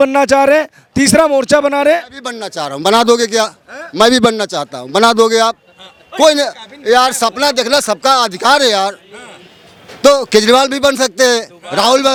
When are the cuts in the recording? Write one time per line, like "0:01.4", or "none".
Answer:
none